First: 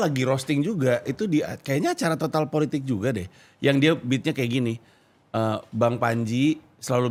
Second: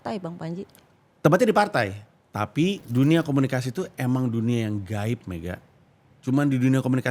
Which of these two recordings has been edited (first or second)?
second